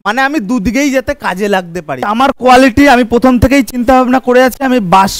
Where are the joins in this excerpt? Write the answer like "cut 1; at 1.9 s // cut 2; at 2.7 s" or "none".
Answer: cut 1; at 2.1 s